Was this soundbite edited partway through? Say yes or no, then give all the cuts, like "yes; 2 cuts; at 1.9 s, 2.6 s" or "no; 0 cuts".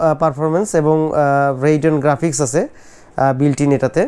no; 0 cuts